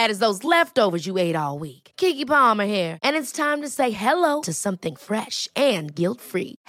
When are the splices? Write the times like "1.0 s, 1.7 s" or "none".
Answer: none